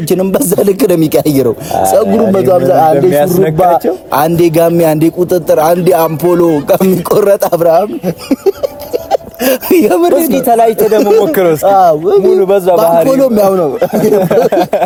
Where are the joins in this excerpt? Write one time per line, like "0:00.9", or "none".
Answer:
none

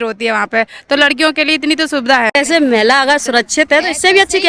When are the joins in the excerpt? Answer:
0:02.3

